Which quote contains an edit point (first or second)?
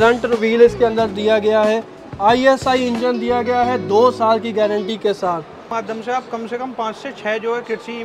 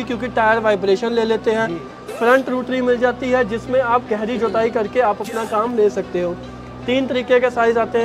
first